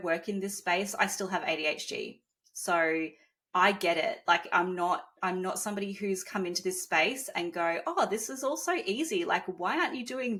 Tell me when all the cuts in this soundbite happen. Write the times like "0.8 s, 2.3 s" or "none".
none